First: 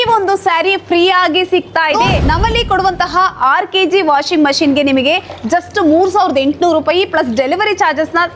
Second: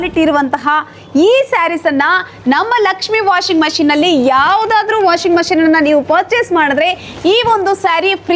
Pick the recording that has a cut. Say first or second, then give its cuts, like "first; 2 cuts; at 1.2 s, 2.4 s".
first; 1 cut; at 1.9 s